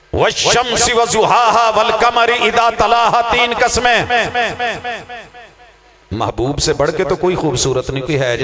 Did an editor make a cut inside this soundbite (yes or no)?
no